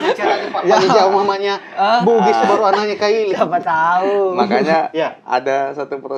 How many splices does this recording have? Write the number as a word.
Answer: zero